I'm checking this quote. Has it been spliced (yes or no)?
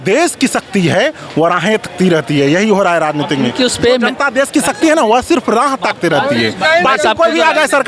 no